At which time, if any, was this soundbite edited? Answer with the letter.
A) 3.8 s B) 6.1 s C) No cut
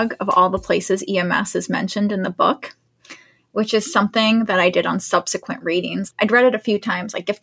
B